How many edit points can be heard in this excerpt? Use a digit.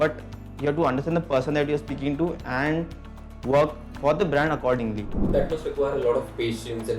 1